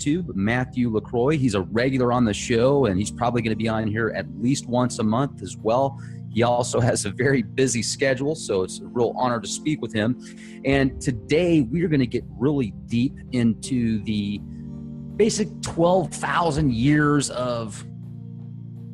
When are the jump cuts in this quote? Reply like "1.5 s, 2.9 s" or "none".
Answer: 4.8 s